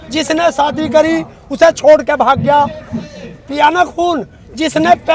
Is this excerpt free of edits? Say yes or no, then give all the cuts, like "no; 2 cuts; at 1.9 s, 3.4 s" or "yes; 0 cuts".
yes; 0 cuts